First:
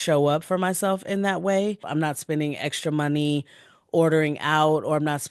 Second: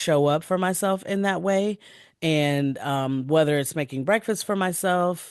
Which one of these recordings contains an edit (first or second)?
first